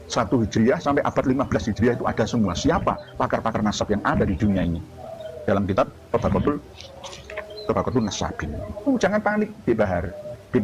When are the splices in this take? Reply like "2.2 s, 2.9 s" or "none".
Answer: 8.9 s